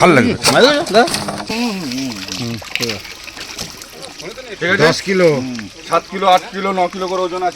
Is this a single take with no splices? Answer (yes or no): no